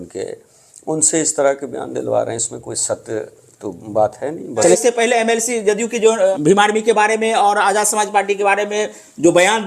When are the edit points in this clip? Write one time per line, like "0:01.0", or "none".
0:04.8
0:06.4